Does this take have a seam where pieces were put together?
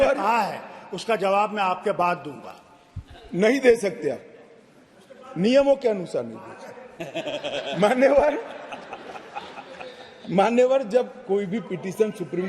no; 0 cuts

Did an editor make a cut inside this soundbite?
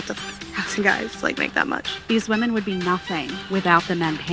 yes; 2 cuts; at 2.0 s, 3.3 s

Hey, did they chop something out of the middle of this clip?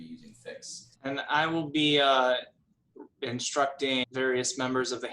yes; 2 cuts; at 0.9 s, 4.1 s

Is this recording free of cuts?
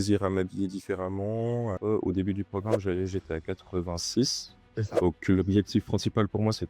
no; 1 cut; at 1.7 s

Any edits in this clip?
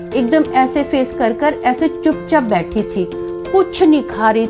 no; 0 cuts

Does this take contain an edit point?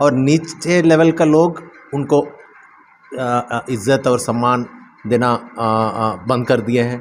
no; 0 cuts

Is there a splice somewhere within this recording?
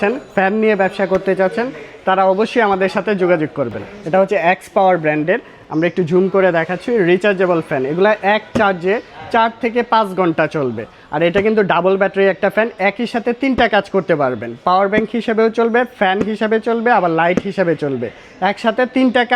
yes; 1 cut; at 3.9 s

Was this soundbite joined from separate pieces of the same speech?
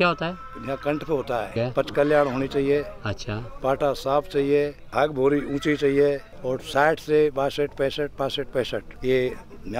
yes; 4 cuts; at 1.5 s, 4.8 s, 6.3 s, 8.9 s

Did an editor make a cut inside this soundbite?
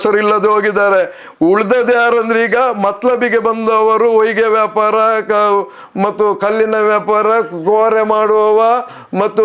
no; 0 cuts

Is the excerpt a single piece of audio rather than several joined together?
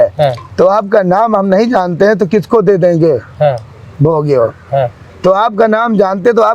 yes; 0 cuts

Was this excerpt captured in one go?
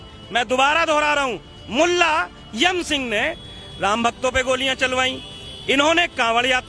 yes; 0 cuts

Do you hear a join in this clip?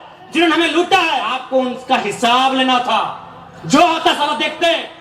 yes; 1 cut; at 1.4 s

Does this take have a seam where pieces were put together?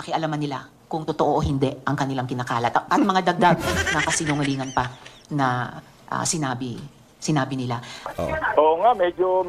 yes; 1 cut; at 8.1 s

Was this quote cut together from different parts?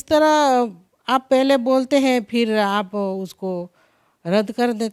no; 0 cuts

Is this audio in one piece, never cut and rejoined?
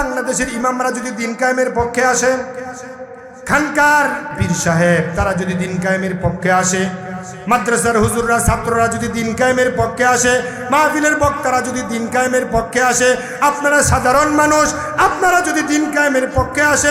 no; 1 cut; at 4.4 s

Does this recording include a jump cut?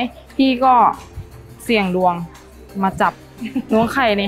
no; 0 cuts

